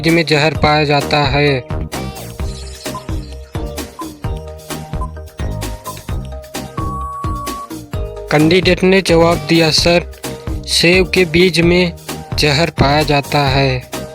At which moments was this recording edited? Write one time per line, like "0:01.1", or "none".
0:01.6
0:07.8